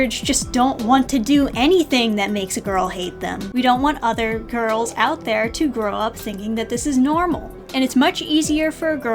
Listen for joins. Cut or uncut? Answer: cut